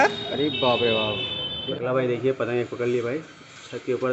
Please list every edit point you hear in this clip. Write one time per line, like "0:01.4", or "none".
0:01.6